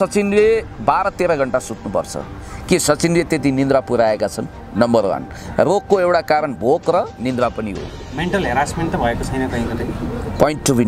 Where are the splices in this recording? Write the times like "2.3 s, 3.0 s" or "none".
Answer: none